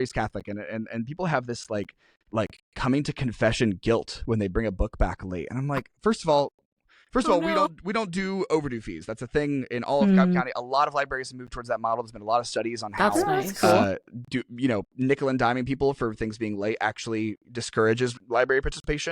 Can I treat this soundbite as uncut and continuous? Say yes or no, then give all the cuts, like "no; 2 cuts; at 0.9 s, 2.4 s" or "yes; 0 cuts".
no; 1 cut; at 18.2 s